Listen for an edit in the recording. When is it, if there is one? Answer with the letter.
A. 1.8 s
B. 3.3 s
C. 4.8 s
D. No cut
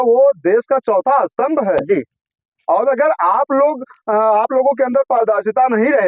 D